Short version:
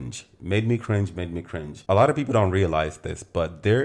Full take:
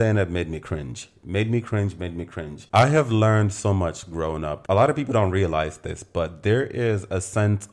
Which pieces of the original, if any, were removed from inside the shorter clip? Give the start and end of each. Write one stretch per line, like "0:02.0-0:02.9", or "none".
0:02.6-0:04.6